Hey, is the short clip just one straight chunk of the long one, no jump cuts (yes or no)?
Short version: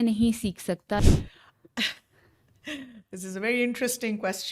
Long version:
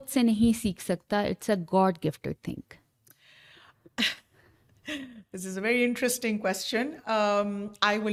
no